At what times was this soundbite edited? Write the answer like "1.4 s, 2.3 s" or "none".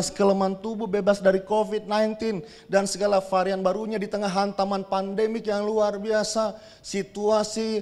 none